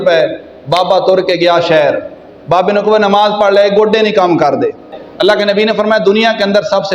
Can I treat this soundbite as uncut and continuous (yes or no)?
no